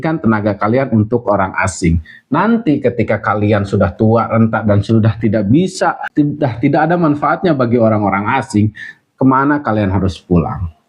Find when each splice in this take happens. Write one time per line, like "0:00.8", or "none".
0:06.0

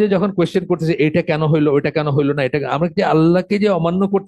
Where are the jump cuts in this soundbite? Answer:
none

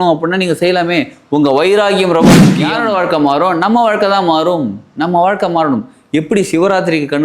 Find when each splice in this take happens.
0:02.6

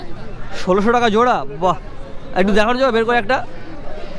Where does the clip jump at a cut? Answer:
none

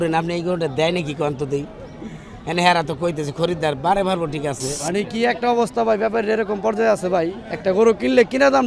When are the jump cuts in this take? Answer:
0:04.7

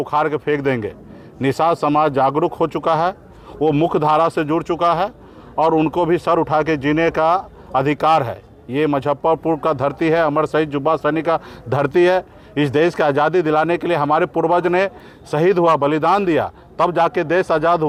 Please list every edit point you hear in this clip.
none

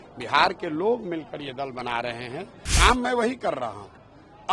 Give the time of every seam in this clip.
0:02.6

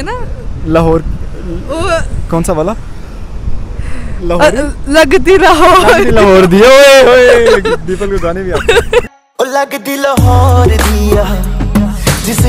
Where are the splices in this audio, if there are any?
none

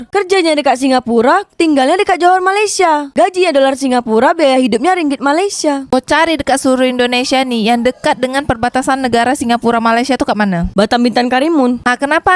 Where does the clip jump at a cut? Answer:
0:05.9

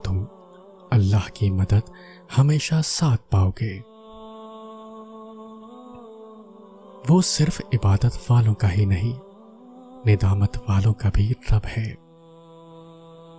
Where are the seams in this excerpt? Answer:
0:04.3
0:07.0

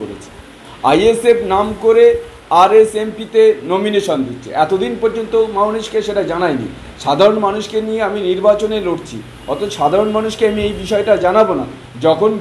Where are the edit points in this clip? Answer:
none

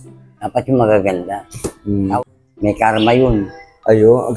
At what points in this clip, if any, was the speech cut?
0:02.1

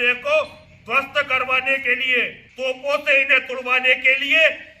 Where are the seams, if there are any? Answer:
0:02.4

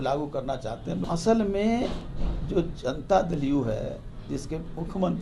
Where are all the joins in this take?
0:01.0

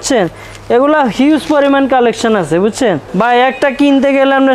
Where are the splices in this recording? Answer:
0:03.1

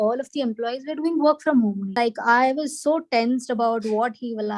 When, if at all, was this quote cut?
0:01.9

